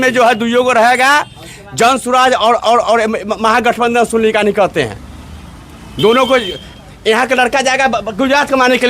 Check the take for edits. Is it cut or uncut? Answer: uncut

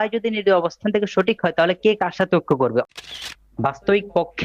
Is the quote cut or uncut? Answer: cut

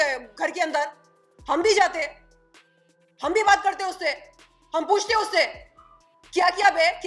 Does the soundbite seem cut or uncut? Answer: uncut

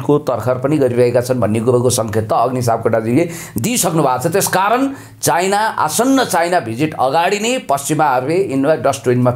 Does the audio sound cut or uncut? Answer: uncut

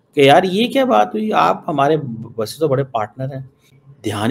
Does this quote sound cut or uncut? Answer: uncut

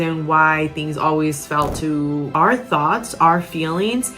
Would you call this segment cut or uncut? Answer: cut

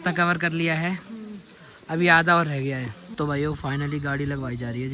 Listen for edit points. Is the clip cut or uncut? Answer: cut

